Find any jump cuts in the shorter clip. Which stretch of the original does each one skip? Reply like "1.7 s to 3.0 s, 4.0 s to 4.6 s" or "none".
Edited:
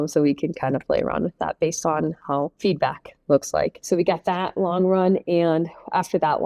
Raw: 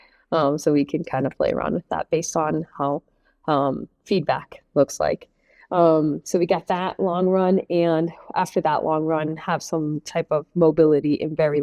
3.0 s to 4.0 s, 5.3 s to 6.2 s

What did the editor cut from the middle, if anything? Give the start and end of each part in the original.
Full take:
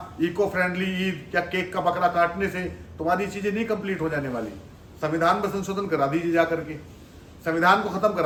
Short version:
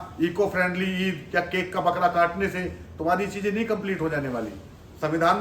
none

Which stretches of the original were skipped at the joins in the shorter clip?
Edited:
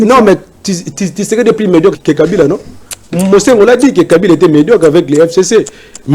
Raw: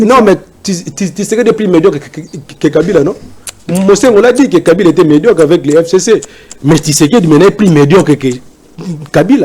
2.0 s to 2.5 s

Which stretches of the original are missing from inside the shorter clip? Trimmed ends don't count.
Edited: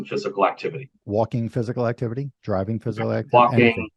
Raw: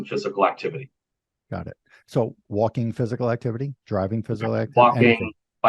1.0 s to 2.4 s

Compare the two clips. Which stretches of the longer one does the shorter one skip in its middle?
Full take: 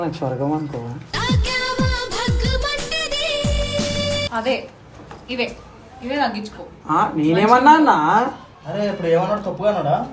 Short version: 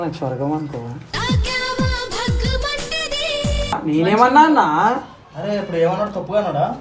3.7 s to 7.0 s

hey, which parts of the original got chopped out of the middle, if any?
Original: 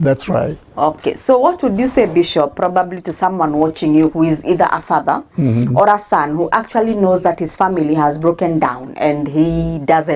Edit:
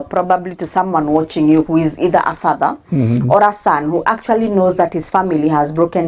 none

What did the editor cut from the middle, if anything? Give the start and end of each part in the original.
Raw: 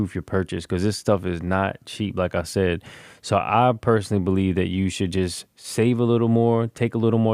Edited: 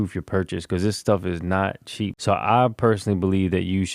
2.1 s to 3.2 s

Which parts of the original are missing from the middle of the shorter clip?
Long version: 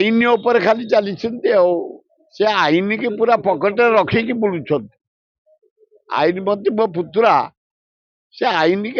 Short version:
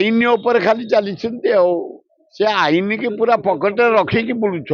none

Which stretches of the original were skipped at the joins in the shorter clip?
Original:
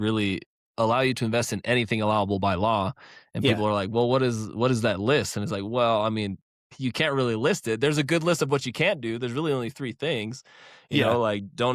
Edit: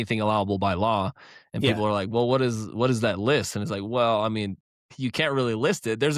none

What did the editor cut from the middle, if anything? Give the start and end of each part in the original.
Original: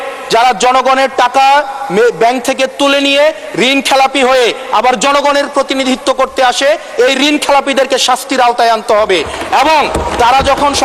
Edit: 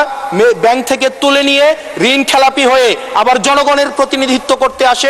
none

